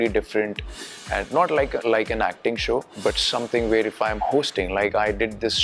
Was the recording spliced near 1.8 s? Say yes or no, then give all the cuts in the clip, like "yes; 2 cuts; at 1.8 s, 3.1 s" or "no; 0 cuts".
yes; 2 cuts; at 1.8 s, 2.9 s